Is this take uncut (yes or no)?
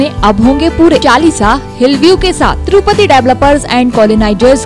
no